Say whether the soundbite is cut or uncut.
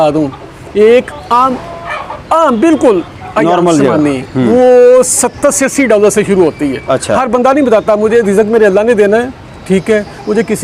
uncut